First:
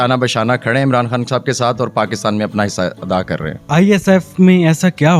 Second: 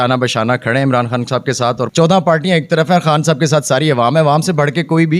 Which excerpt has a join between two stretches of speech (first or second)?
second